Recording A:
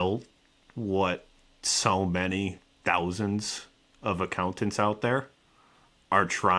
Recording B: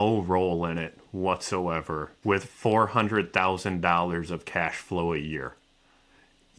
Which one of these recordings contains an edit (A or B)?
B